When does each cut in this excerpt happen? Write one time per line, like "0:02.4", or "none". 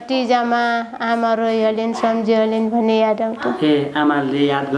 none